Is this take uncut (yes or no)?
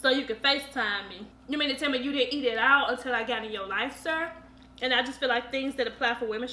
no